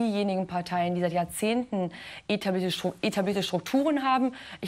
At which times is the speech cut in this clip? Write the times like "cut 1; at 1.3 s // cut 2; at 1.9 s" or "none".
cut 1; at 2.1 s